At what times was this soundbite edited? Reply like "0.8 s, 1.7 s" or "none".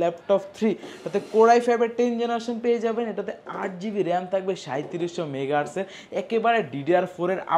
none